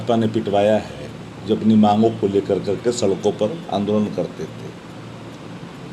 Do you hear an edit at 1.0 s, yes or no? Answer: no